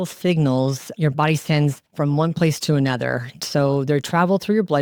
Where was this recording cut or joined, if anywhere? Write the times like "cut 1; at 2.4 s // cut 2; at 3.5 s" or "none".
none